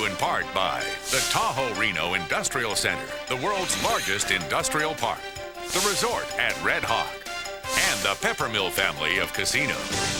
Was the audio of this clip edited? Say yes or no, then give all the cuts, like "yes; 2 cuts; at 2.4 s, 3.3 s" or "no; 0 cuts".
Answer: no; 0 cuts